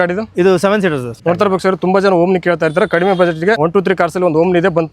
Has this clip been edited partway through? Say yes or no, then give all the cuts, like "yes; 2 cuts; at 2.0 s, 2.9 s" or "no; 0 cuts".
yes; 2 cuts; at 1.1 s, 3.6 s